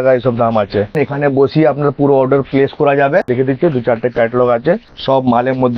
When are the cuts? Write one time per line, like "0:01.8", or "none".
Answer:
0:00.9
0:03.3
0:04.9